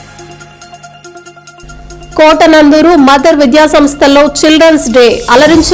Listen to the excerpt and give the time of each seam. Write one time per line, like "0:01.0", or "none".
none